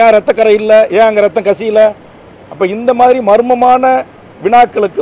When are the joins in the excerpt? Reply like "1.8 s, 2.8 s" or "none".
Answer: none